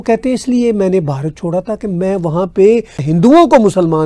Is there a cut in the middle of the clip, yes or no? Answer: yes